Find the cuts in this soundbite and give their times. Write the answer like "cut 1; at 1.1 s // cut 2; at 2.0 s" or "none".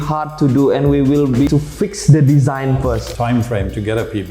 cut 1; at 1.5 s // cut 2; at 3.1 s